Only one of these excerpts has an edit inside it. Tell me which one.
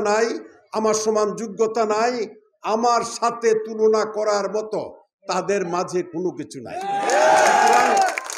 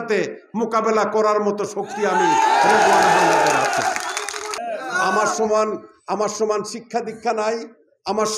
second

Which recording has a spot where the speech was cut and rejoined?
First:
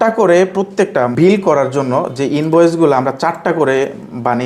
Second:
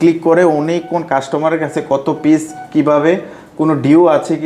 first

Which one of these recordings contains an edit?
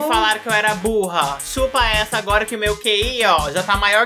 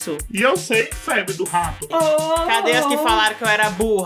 second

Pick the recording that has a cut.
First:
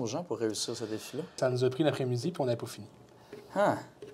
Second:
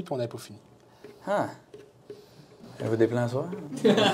first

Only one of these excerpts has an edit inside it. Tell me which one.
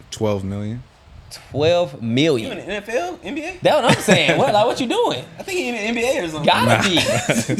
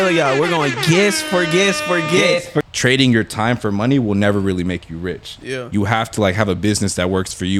second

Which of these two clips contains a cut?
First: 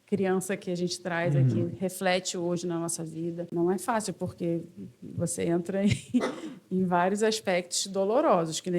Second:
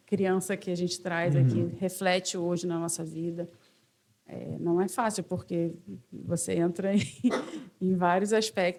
first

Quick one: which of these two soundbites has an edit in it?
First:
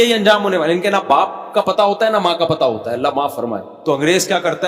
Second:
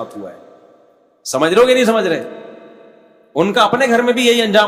first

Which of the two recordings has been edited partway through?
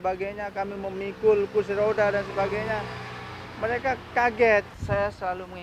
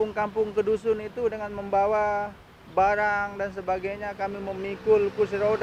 first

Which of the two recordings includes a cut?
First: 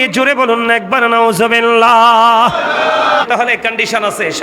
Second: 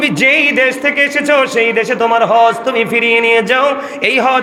first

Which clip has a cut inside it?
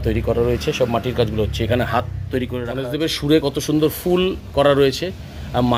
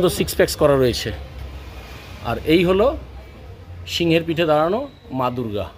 first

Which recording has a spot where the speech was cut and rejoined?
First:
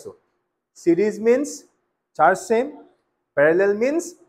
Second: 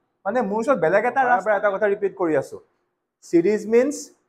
second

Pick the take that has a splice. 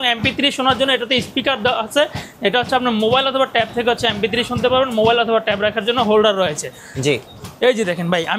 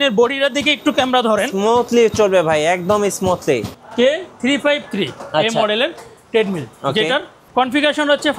second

